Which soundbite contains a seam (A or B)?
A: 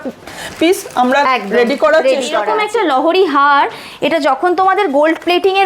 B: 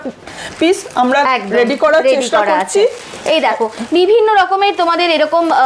A